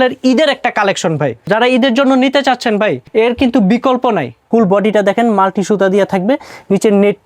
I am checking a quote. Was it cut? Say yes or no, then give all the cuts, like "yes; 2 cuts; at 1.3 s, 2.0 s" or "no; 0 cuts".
yes; 3 cuts; at 1.5 s, 3.0 s, 4.3 s